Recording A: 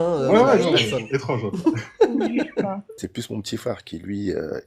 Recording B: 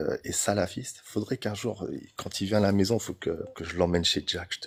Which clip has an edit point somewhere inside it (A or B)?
A